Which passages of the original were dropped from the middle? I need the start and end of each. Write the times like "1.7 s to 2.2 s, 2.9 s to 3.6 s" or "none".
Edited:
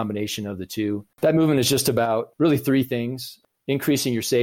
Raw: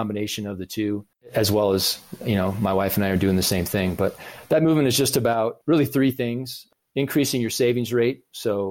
1.1 s to 4.3 s